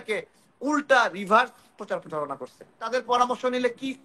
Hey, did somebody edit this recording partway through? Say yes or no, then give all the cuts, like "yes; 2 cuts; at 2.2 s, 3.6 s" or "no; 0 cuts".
yes; 1 cut; at 2.8 s